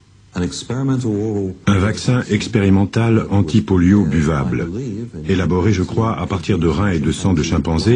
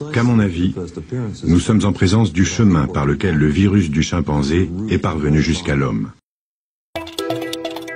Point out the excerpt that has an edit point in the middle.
second; 1 cut; at 6.2 s

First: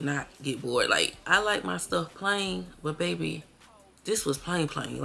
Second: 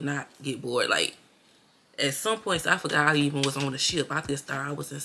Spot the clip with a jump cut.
first; 1 cut; at 1.2 s

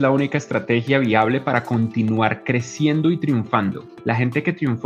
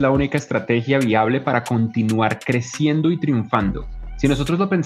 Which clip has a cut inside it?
first; 1 cut; at 3.9 s

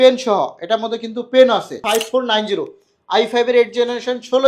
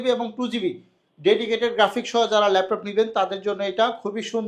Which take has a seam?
first; 1 cut; at 1.8 s

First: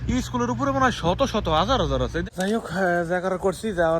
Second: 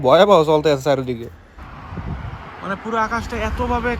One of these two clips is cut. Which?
first; 1 cut; at 2.2 s

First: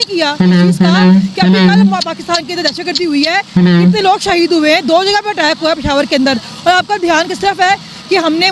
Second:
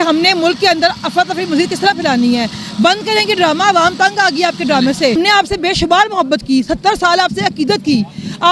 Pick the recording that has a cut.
second; 1 cut; at 5.1 s

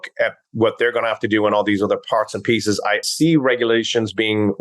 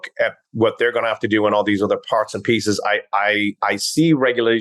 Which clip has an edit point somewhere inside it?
first; 1 cut; at 3.1 s

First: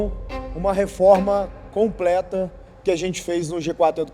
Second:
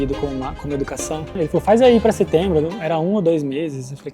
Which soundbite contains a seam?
second; 1 cut; at 1.3 s

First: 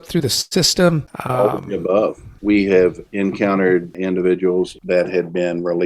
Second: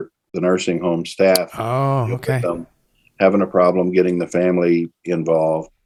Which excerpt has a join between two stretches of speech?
first; 5 cuts; at 1.1 s, 2.3 s, 3.1 s, 4.0 s, 4.8 s

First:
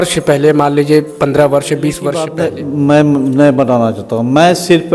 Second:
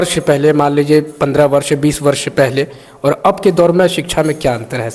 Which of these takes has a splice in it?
first; 1 cut; at 2.2 s

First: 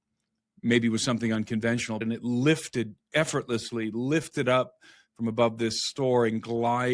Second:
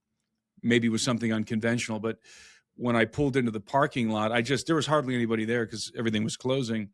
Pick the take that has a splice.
first; 1 cut; at 2.0 s

